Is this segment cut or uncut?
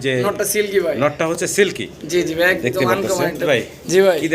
cut